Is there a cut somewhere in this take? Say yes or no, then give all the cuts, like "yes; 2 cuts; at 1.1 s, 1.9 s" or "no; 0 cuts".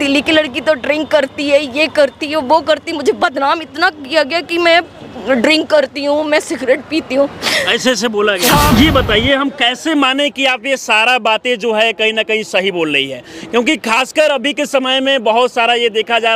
yes; 1 cut; at 8.7 s